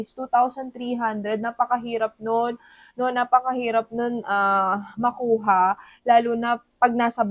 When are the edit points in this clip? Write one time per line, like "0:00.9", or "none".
none